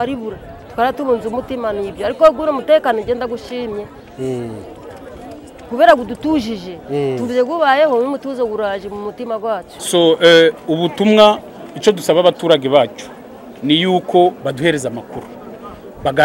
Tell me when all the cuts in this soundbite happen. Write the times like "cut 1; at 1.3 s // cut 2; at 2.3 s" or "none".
cut 1; at 9.7 s